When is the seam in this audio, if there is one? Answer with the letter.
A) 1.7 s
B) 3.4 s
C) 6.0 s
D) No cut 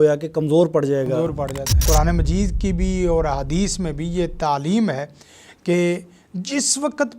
A